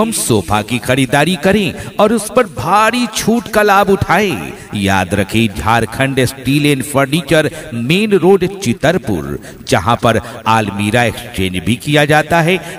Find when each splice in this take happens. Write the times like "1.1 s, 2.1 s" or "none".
9.4 s